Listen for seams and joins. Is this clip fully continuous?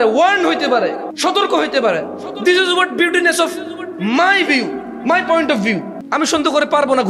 no; 2 cuts; at 1.1 s, 5.9 s

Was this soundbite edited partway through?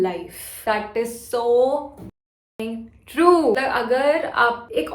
yes; 1 cut; at 3.6 s

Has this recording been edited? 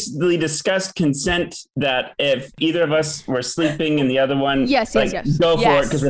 no; 0 cuts

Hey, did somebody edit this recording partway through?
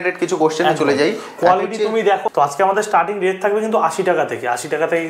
yes; 1 cut; at 2.3 s

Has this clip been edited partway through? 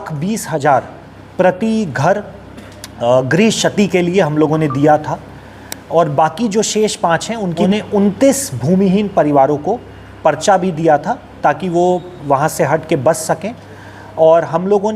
yes; 1 cut; at 7.7 s

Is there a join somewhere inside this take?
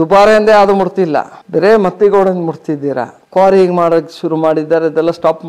yes; 2 cuts; at 1.3 s, 3.2 s

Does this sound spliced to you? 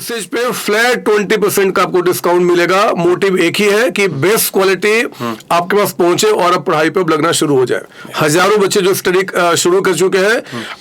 no; 0 cuts

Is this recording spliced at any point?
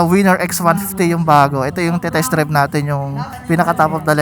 yes; 1 cut; at 3.3 s

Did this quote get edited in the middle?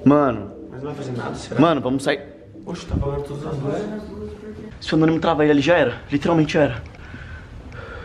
yes; 1 cut; at 4.8 s

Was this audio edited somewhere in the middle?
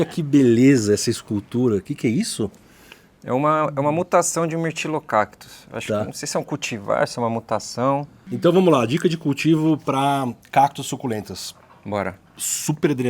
yes; 1 cut; at 8.2 s

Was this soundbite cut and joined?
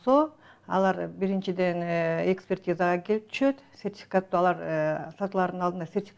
no; 0 cuts

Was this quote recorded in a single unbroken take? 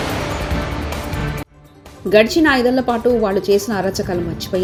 yes; 0 cuts

